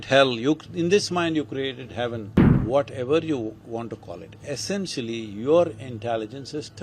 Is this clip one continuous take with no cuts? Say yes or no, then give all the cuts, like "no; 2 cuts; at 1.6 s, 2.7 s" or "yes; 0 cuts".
no; 1 cut; at 2.4 s